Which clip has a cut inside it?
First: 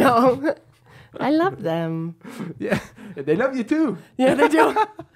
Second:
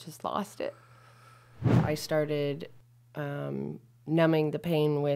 second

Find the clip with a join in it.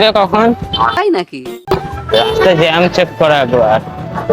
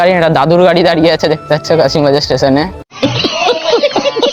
first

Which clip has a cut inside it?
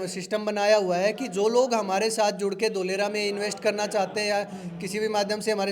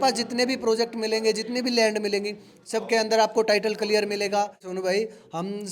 second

